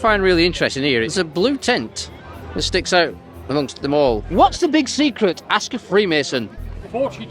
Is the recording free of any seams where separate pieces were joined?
no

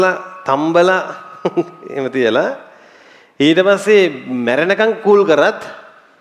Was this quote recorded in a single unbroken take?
yes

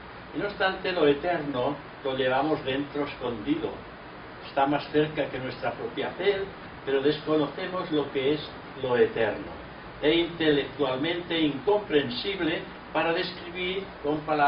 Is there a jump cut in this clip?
yes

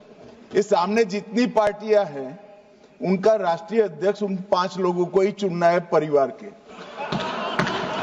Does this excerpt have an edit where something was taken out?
no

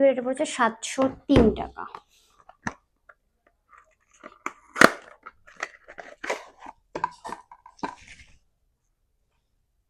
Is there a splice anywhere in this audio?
no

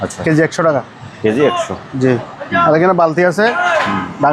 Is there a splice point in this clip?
no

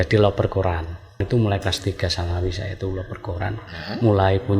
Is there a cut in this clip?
yes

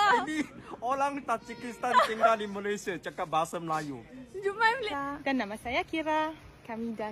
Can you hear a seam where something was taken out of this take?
yes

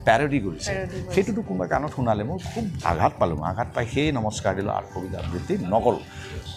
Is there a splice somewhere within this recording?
no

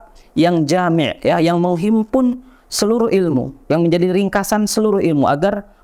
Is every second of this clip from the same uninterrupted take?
yes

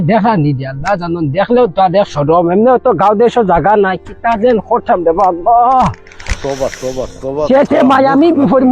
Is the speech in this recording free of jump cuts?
yes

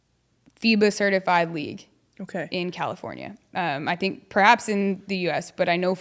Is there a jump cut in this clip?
no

